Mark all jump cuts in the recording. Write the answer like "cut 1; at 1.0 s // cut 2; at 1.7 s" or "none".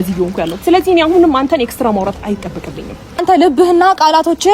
cut 1; at 3.2 s